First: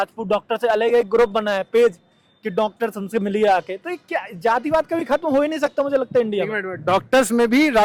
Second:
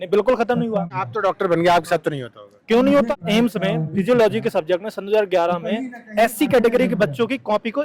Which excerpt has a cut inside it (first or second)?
second